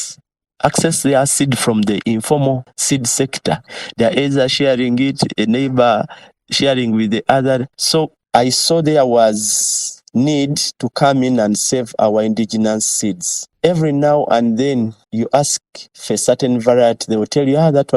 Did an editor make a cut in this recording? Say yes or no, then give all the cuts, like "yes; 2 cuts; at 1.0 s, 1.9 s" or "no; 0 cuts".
yes; 3 cuts; at 2.7 s, 3.7 s, 8.1 s